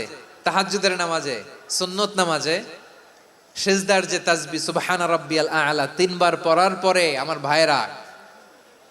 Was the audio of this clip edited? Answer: no; 0 cuts

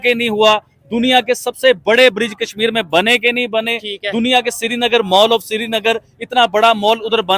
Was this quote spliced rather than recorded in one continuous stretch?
no; 0 cuts

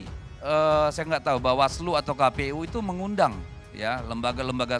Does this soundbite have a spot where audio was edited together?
no; 0 cuts

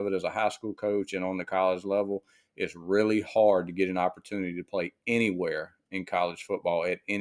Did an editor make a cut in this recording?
no; 0 cuts

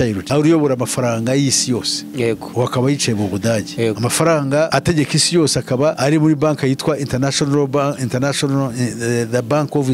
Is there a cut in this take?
no; 0 cuts

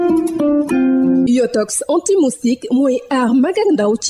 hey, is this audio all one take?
no; 1 cut; at 1.2 s

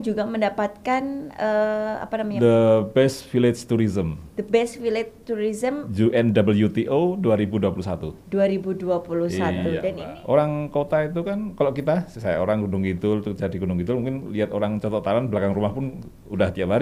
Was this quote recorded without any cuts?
no; 1 cut; at 10.0 s

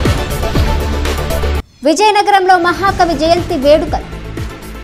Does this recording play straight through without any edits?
no; 1 cut; at 1.4 s

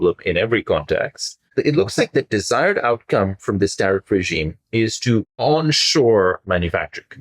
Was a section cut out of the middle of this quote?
yes; 3 cuts; at 1.5 s, 5.3 s, 6.5 s

